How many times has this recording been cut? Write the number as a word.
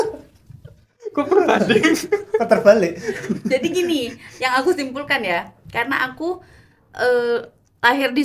zero